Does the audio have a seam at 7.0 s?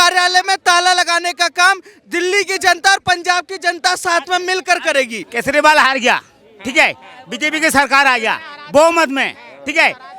no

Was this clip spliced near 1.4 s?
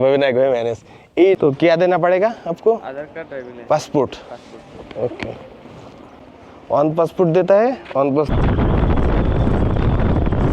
yes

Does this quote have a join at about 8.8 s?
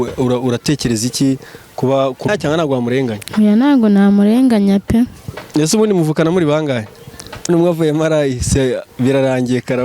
no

